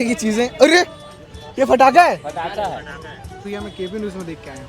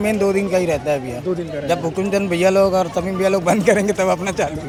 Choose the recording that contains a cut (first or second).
first